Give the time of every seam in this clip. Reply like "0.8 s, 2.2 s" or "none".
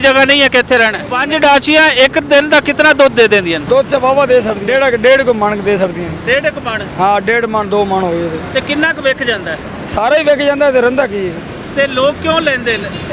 1.1 s, 3.6 s, 4.6 s